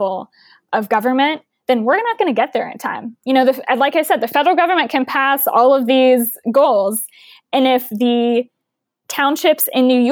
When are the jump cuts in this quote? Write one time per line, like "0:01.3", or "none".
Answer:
none